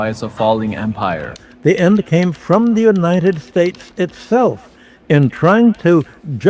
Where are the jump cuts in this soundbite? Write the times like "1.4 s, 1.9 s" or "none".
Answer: 1.9 s